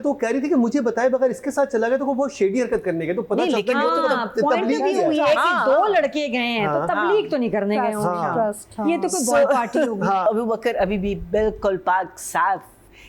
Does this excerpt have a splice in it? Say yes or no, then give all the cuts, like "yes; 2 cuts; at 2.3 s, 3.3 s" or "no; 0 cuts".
yes; 1 cut; at 10.3 s